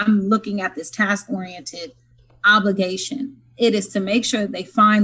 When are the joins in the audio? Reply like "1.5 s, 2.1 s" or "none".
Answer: none